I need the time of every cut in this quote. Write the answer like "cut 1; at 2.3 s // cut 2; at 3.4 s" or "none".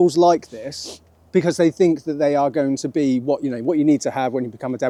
none